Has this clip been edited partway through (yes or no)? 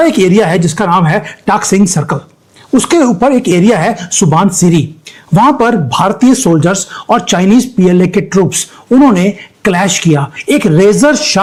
no